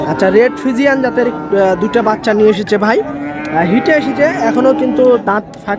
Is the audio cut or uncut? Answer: uncut